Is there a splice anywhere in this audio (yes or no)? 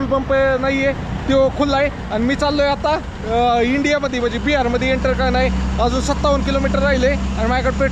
no